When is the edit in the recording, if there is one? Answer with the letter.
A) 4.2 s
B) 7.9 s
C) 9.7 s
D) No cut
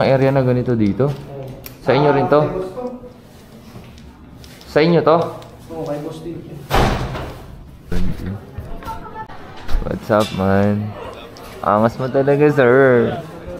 B